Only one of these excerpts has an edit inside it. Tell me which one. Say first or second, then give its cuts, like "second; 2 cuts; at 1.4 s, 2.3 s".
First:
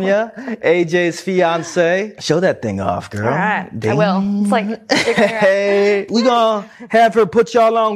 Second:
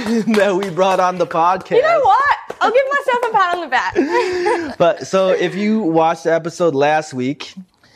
first; 2 cuts; at 2.1 s, 6.1 s